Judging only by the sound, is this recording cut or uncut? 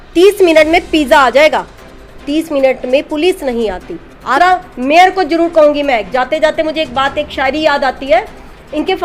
cut